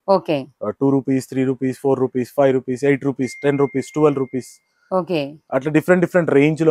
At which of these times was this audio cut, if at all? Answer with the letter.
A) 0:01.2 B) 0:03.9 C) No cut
C